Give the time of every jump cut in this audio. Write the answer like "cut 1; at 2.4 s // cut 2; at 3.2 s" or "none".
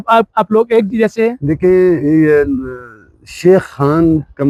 none